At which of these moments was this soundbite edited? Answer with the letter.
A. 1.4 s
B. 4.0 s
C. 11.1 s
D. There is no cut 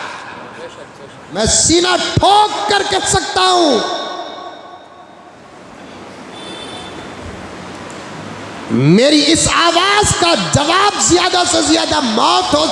A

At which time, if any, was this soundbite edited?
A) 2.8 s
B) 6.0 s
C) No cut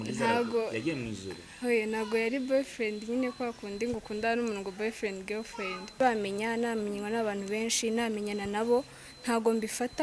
B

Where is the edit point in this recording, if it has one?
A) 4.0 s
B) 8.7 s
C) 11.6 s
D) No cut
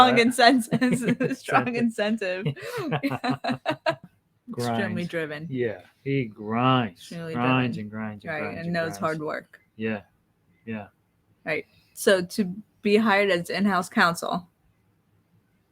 A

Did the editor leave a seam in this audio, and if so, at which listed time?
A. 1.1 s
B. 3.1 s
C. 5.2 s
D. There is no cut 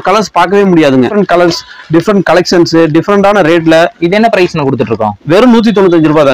A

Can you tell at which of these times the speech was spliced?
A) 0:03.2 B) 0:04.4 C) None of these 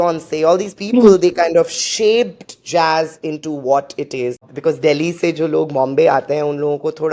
B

